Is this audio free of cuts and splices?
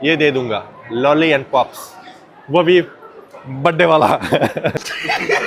yes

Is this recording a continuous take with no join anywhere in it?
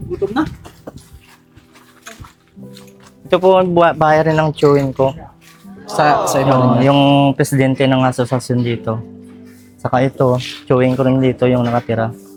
yes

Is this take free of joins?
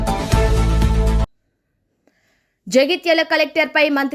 no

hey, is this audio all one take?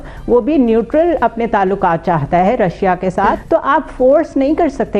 no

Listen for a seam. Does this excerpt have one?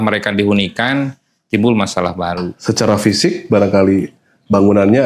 yes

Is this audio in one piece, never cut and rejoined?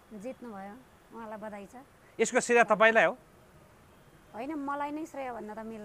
yes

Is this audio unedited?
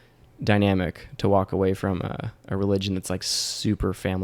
yes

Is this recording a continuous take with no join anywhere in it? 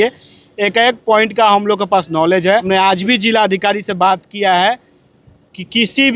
no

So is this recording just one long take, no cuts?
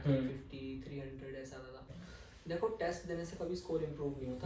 no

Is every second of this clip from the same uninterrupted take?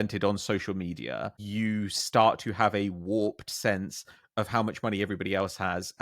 no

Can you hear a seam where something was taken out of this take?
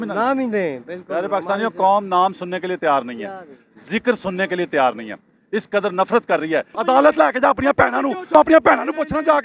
yes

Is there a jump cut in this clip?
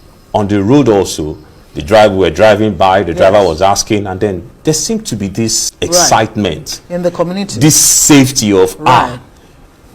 yes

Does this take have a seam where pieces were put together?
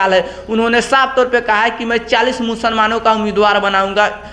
no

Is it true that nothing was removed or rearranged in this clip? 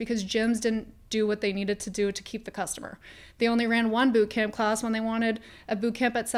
yes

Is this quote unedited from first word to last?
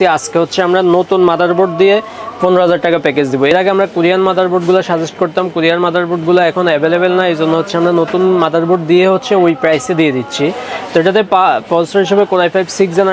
yes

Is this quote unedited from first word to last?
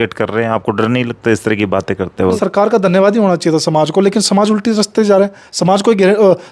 no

